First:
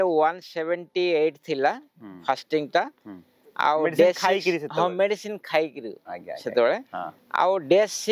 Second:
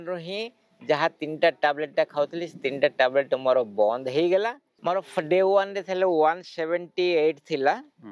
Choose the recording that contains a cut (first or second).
second